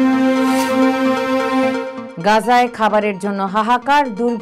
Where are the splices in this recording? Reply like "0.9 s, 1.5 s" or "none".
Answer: none